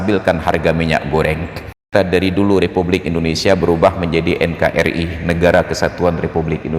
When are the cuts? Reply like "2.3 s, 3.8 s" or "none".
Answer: 1.9 s